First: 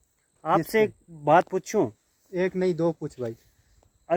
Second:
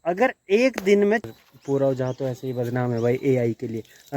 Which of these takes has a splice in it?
second; 1 cut; at 1.3 s

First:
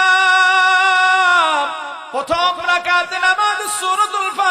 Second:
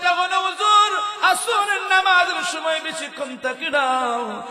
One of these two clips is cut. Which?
first; 1 cut; at 1.9 s

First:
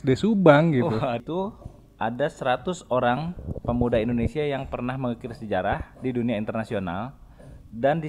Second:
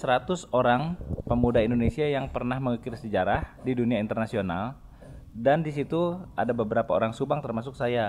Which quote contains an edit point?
first; 1 cut; at 1.2 s

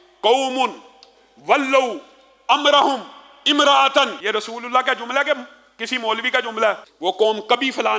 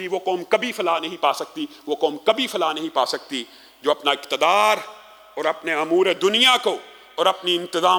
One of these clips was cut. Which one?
first; 2 cuts; at 4.2 s, 6.9 s

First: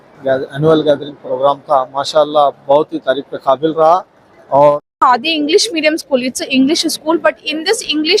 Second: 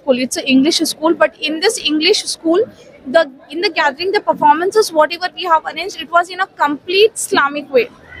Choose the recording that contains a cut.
first; 1 cut; at 4.9 s

